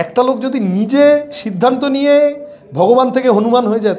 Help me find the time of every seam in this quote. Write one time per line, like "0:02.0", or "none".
none